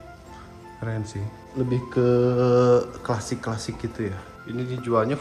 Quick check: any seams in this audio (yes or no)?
yes